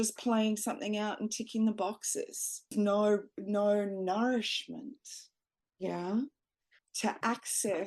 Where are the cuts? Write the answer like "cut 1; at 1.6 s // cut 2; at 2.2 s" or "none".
cut 1; at 2.7 s // cut 2; at 6.7 s

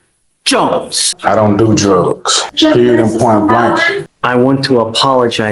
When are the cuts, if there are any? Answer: cut 1; at 1.1 s // cut 2; at 2.3 s // cut 3; at 4.0 s

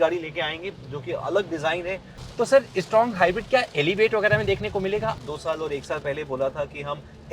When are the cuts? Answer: cut 1; at 2.1 s // cut 2; at 5.2 s

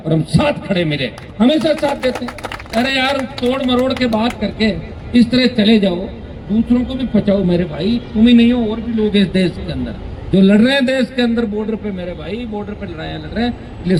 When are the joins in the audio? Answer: none

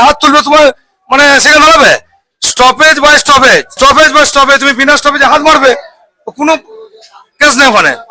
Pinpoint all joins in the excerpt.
none

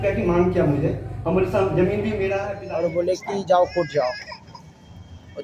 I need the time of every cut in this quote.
cut 1; at 2.6 s

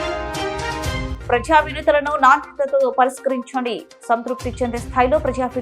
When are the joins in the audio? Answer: cut 1; at 1.1 s

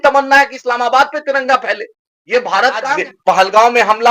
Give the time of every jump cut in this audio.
cut 1; at 2.9 s

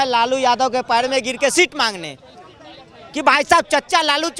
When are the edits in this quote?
none

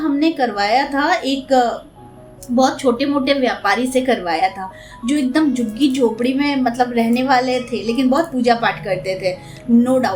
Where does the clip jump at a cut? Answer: none

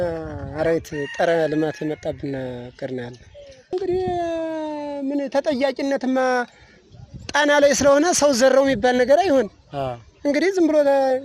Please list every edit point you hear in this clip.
cut 1; at 3.7 s

